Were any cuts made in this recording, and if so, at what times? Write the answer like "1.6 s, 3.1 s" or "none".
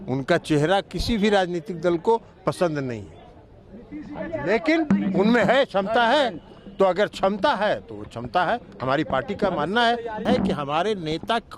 10.2 s